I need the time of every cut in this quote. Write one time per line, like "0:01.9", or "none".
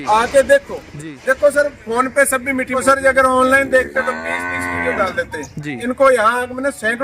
0:02.8